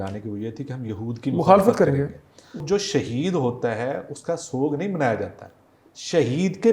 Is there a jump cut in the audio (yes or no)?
yes